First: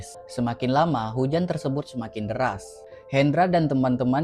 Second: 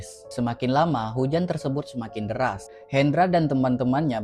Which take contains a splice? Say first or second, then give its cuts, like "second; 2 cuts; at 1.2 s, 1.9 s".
second; 1 cut; at 2.7 s